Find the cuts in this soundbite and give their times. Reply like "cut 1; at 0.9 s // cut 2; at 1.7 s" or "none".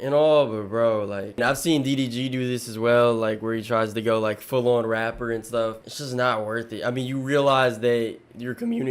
cut 1; at 1.4 s // cut 2; at 5.9 s